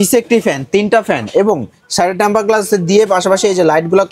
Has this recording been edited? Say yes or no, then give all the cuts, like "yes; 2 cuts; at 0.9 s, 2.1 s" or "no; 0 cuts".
no; 0 cuts